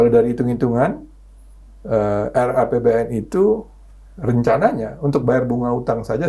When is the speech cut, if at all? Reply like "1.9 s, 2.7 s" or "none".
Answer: none